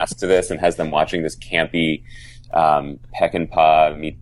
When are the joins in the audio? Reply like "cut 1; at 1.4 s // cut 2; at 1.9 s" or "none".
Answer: none